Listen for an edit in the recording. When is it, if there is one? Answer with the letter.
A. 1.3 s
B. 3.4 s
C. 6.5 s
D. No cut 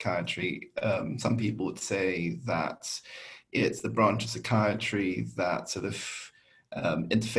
D